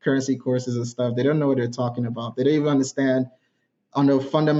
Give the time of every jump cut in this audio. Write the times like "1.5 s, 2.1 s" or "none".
none